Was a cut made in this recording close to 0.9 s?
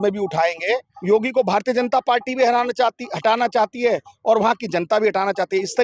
yes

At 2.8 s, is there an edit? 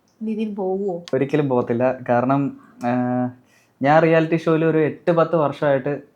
no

